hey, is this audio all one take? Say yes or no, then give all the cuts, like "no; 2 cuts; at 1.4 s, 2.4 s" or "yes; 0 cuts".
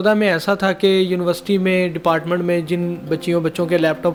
yes; 0 cuts